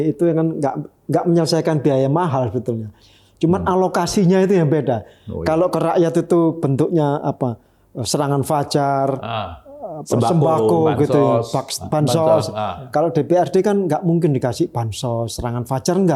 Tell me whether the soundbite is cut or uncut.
uncut